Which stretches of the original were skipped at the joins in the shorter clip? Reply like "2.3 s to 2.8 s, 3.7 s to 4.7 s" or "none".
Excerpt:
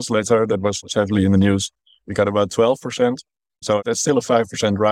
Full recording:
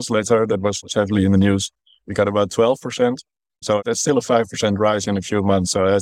none